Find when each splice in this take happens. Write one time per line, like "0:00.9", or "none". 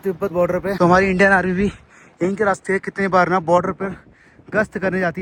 none